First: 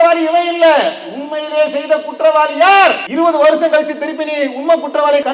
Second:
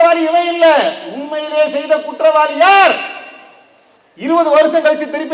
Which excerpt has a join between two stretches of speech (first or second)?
first